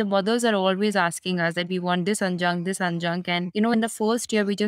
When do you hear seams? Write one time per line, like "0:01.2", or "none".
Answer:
0:03.7